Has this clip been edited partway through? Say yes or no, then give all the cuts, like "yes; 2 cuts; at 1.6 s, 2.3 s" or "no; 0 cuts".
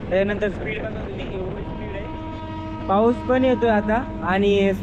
no; 0 cuts